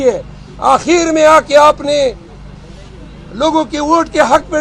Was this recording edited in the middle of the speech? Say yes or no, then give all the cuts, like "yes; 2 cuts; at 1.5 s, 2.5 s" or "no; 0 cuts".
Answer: no; 0 cuts